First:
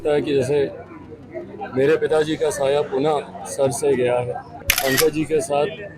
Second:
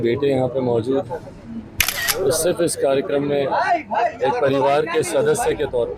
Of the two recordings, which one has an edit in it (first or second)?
first